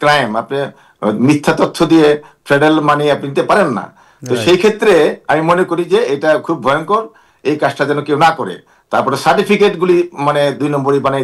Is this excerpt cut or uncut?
uncut